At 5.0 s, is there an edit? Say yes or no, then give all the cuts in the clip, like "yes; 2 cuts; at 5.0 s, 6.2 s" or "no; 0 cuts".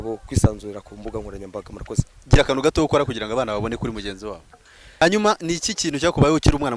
yes; 2 cuts; at 2.2 s, 5.0 s